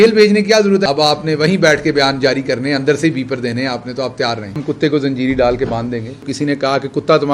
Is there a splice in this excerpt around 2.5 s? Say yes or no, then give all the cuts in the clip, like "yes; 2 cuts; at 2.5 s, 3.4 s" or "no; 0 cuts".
no; 3 cuts; at 0.8 s, 4.6 s, 6.3 s